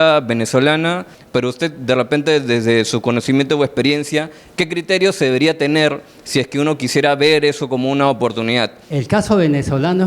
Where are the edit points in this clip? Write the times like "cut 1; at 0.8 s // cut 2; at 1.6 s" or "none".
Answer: cut 1; at 1.1 s // cut 2; at 8.8 s